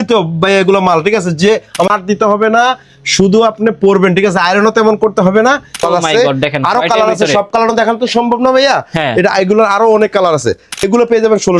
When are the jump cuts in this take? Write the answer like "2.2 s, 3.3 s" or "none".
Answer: 1.9 s, 5.8 s, 10.8 s